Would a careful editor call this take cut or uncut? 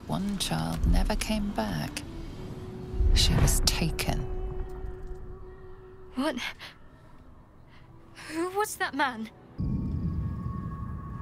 cut